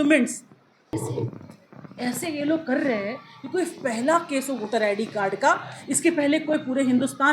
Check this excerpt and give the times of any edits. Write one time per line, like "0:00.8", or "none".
0:00.9